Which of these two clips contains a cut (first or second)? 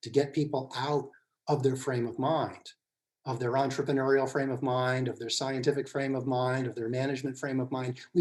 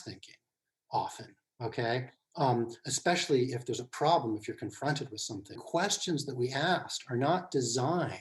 second